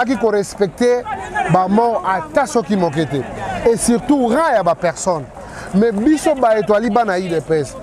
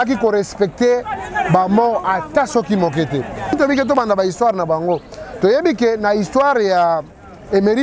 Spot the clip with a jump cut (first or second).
second